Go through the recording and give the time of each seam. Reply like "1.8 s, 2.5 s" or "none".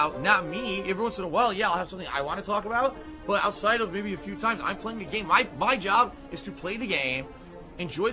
1.9 s